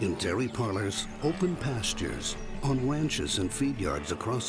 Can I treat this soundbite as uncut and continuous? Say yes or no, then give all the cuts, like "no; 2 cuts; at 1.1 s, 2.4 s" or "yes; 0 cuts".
yes; 0 cuts